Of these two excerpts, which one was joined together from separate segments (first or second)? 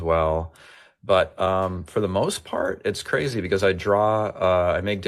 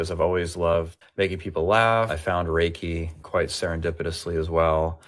second